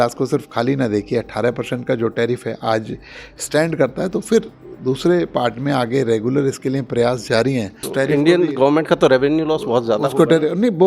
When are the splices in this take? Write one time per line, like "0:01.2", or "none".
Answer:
0:07.9